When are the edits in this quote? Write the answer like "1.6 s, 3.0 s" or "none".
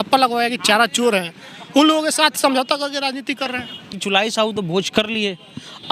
4.0 s